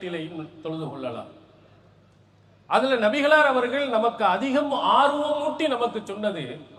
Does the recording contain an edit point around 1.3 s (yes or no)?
no